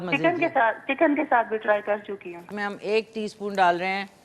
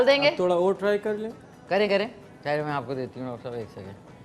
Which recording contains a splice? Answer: first; 1 cut; at 2.4 s

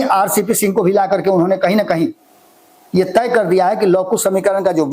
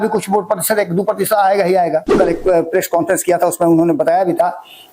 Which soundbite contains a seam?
second; 1 cut; at 2.1 s

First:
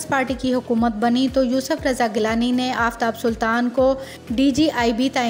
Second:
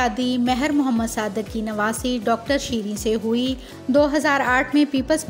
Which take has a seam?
second; 1 cut; at 3.7 s

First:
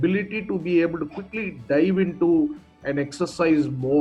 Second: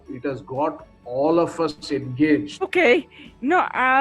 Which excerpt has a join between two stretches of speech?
second; 1 cut; at 2.7 s

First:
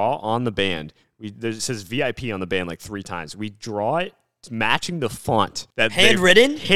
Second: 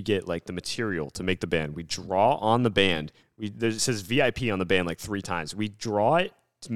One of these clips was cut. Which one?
first; 1 cut; at 5.6 s

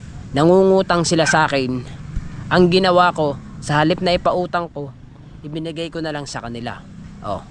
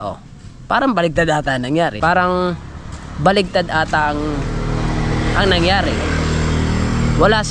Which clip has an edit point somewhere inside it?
second; 1 cut; at 1.9 s

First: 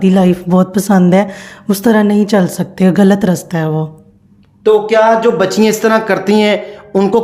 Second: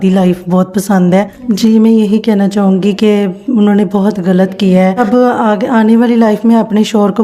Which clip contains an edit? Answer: second; 2 cuts; at 1.4 s, 5.0 s

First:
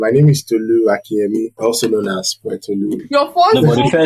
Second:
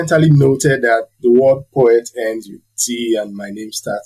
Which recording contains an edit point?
first; 2 cuts; at 1.5 s, 3.0 s

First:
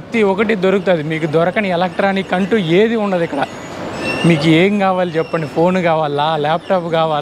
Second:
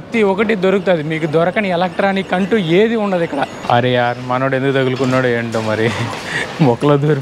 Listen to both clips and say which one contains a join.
second; 1 cut; at 3.6 s

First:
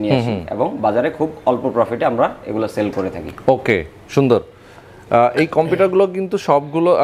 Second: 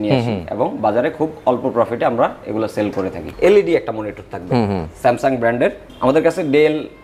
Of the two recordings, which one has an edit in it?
second; 1 cut; at 3.2 s

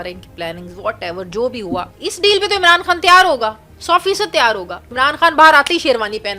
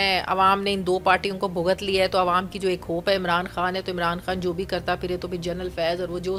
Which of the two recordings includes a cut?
first; 2 cuts; at 1.9 s, 4.9 s

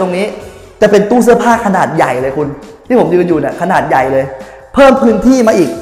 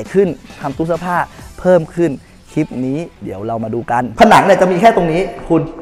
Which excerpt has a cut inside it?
second; 1 cut; at 4.1 s

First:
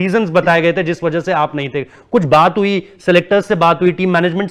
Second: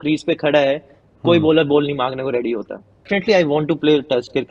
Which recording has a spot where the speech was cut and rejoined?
second; 1 cut; at 3.1 s

